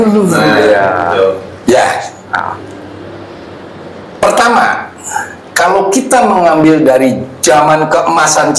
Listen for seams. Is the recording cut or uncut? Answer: uncut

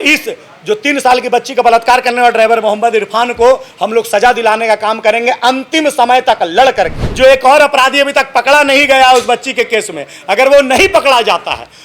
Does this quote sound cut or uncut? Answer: cut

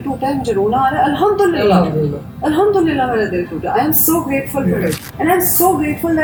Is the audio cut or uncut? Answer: uncut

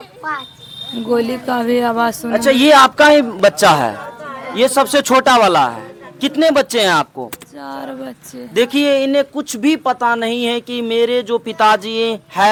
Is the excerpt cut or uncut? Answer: uncut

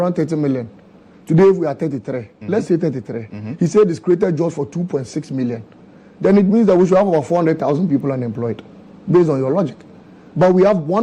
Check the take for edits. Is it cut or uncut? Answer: uncut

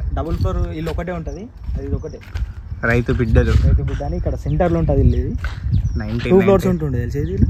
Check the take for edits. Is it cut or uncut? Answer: uncut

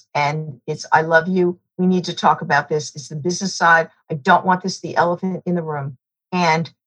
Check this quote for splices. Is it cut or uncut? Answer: cut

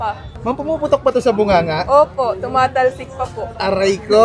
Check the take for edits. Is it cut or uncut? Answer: uncut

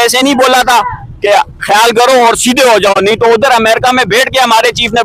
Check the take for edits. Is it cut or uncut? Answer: uncut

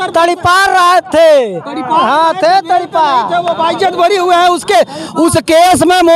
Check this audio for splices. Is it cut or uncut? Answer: uncut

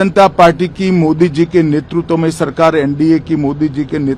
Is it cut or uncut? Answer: uncut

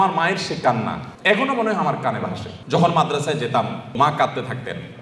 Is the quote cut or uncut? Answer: cut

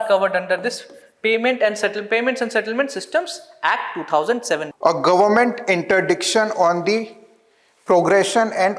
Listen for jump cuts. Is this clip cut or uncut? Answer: cut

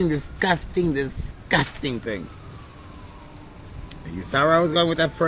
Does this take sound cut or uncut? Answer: cut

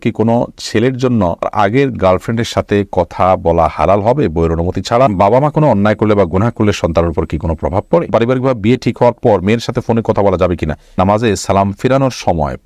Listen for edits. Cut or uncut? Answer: cut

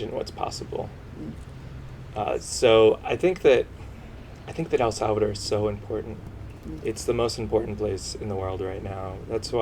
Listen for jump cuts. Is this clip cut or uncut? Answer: uncut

